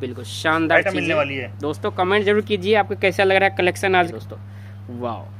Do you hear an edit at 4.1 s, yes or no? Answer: yes